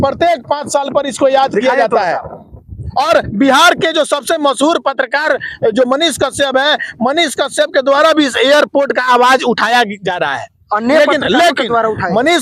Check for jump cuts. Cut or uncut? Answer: uncut